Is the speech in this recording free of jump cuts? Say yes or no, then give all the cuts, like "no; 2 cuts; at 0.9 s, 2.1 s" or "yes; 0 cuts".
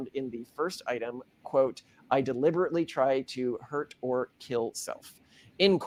yes; 0 cuts